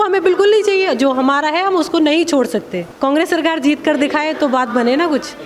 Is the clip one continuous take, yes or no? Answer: no